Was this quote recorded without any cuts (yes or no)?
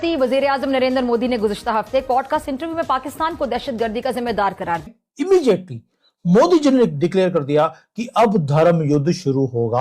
no